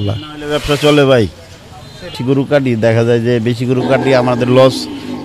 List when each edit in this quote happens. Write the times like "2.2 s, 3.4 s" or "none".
2.2 s